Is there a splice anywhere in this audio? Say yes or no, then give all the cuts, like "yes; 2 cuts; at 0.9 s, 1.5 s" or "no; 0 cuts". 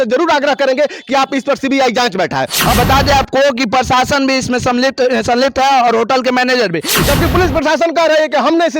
yes; 2 cuts; at 2.7 s, 6.9 s